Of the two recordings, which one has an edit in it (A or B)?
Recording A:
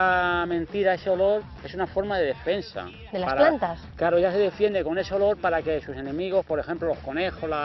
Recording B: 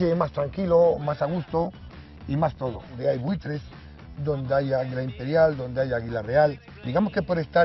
B